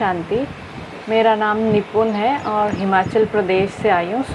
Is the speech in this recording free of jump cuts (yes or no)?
yes